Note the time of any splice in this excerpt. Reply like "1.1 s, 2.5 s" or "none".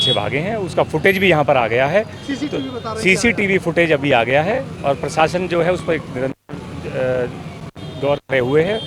none